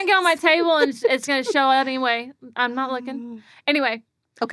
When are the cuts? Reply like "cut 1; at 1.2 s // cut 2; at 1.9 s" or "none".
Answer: none